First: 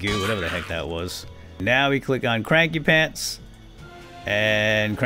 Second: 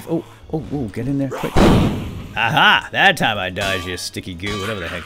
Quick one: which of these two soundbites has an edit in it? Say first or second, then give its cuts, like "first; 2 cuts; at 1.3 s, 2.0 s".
first; 1 cut; at 1.6 s